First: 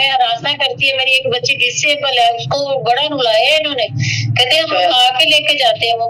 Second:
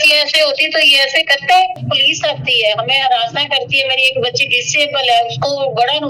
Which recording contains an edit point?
second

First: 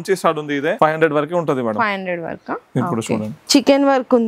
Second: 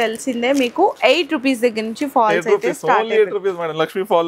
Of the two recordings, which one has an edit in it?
first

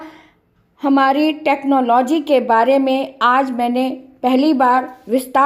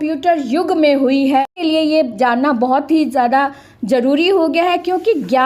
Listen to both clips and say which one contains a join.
second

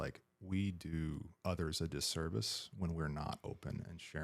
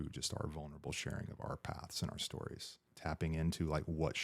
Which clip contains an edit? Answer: second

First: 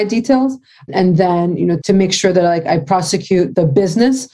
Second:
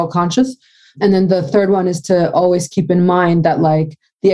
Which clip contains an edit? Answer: first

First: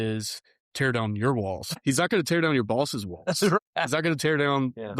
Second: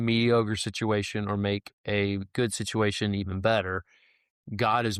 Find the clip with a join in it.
first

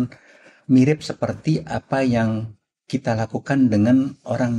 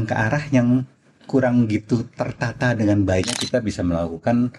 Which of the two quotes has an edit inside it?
second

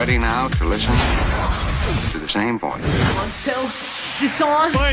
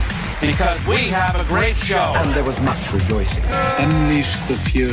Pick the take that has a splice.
first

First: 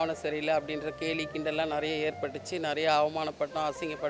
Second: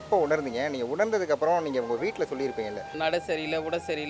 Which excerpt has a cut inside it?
second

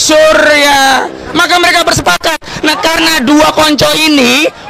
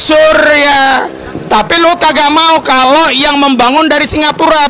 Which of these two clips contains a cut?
first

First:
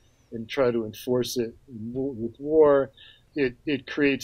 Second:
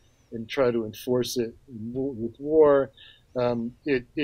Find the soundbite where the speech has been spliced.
first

